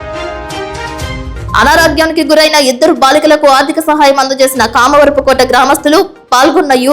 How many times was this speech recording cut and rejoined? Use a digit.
1